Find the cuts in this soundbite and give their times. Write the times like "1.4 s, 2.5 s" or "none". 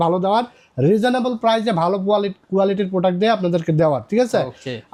none